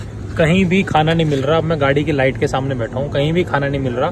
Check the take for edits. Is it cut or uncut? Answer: uncut